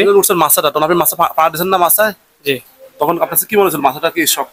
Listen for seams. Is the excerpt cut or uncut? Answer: uncut